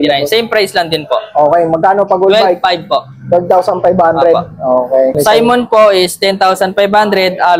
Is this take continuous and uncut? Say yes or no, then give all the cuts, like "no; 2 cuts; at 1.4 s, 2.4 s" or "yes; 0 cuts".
no; 1 cut; at 5.2 s